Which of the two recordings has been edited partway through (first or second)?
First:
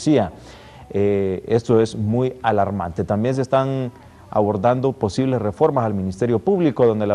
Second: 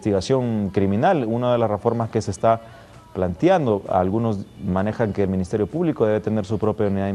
second